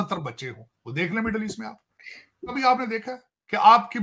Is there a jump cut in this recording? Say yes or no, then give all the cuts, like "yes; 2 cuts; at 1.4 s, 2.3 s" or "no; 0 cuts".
yes; 1 cut; at 2.5 s